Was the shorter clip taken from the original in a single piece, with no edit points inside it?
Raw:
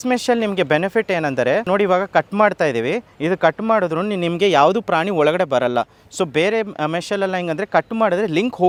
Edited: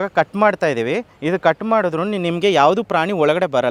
yes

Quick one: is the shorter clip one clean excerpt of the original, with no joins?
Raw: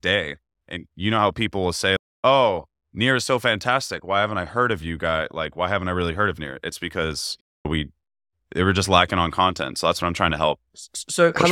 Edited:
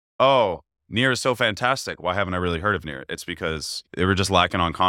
no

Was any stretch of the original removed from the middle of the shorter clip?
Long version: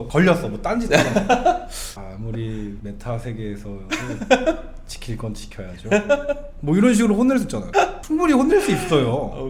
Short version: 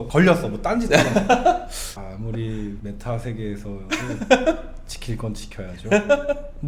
no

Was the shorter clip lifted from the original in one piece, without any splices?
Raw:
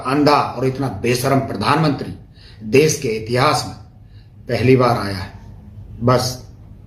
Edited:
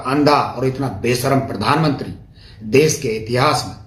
yes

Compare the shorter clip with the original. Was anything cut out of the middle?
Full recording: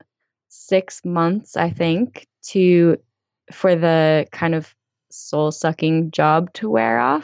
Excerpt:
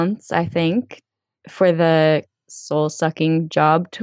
yes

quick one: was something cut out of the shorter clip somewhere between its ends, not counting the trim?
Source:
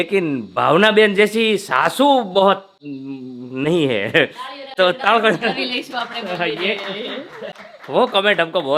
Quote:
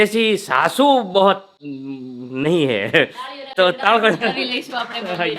no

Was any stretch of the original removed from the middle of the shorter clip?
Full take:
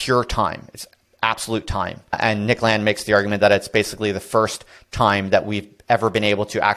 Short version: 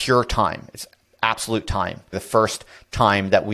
yes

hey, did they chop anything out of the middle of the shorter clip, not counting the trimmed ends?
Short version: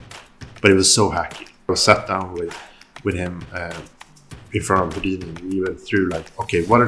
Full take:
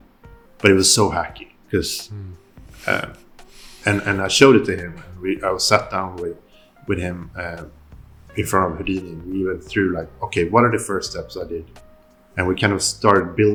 yes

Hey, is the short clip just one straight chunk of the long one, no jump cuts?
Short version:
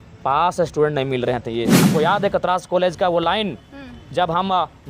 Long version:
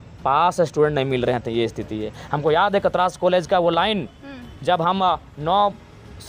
no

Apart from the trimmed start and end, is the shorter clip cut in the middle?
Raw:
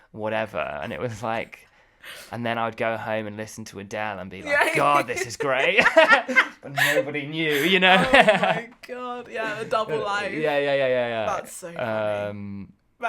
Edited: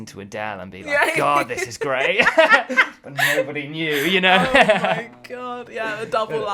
no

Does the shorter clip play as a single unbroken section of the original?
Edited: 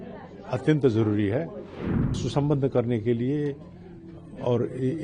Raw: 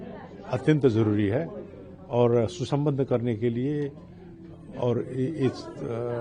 no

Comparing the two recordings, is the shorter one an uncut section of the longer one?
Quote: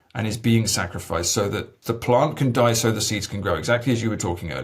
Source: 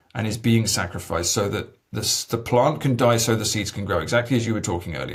no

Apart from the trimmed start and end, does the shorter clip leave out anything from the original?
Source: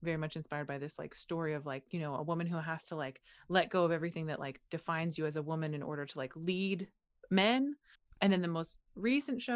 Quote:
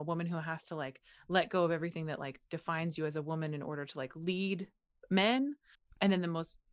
no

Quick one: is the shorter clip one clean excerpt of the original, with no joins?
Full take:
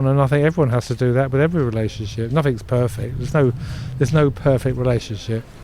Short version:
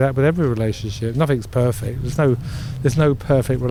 yes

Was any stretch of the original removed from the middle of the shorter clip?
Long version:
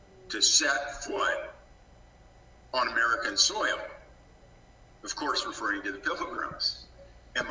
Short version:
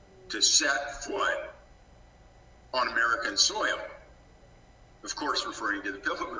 no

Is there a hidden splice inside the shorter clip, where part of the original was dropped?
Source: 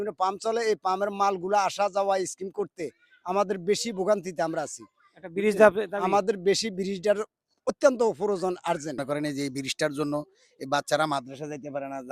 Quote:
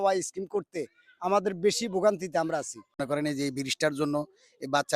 yes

